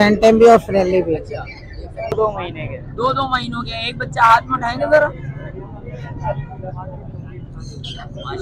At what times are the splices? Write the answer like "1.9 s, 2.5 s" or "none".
2.1 s